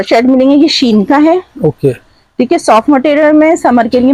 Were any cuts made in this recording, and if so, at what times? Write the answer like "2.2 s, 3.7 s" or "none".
none

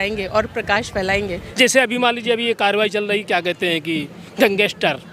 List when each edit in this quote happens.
1.4 s

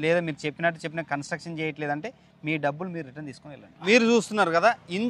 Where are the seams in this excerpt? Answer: 3.7 s

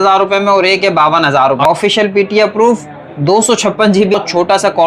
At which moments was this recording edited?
1.7 s, 4.1 s

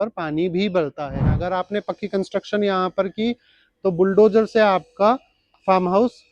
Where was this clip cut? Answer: 1.2 s

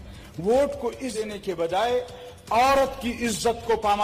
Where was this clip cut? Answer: 1.1 s

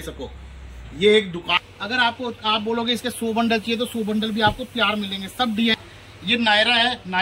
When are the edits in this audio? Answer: 1.5 s, 5.8 s

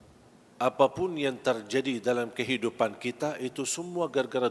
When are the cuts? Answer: none

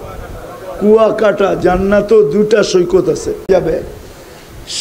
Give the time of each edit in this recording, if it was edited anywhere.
3.7 s

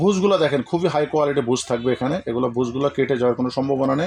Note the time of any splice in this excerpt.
none

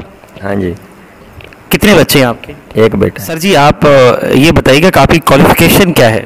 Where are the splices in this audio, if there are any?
3.4 s

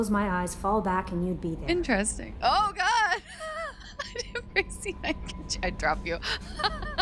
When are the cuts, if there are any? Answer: none

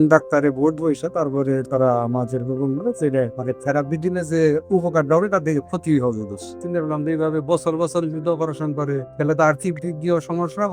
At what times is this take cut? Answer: 3.4 s, 6.6 s, 9.1 s

